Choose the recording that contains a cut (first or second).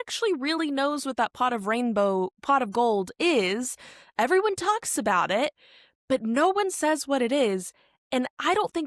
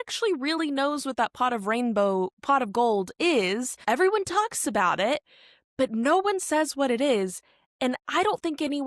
second